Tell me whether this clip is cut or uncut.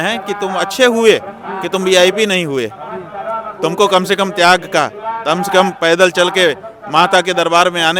uncut